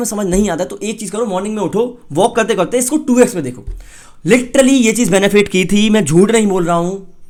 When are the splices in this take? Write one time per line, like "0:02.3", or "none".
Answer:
none